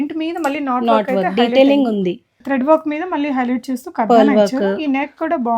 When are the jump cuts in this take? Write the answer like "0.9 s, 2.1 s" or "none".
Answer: 2.4 s